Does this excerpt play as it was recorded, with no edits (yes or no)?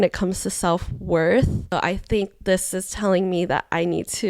no